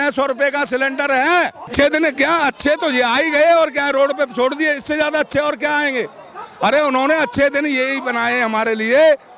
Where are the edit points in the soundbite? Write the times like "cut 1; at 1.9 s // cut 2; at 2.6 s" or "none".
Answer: cut 1; at 1.7 s